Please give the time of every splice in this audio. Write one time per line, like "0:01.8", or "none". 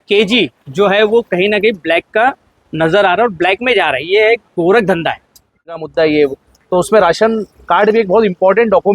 0:05.7